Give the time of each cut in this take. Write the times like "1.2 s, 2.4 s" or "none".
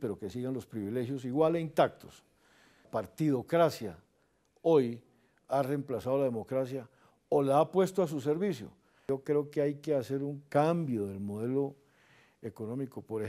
2.9 s, 9.0 s